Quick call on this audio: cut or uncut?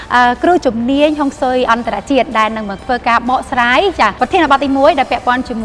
cut